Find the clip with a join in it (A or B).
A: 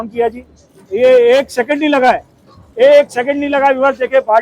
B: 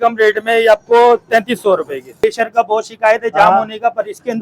B